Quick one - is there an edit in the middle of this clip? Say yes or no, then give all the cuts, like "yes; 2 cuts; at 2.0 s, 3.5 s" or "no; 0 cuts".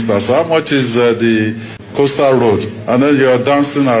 yes; 1 cut; at 1.8 s